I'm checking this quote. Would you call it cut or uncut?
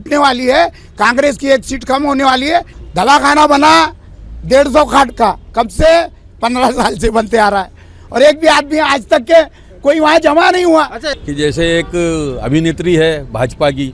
cut